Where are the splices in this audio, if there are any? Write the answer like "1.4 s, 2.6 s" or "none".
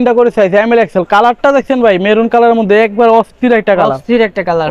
none